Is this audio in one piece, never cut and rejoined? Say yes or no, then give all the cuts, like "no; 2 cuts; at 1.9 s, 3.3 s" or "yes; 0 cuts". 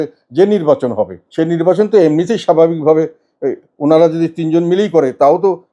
no; 1 cut; at 1.2 s